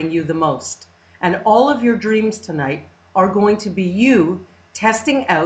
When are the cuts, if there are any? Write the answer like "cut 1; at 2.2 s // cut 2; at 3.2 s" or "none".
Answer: cut 1; at 4.2 s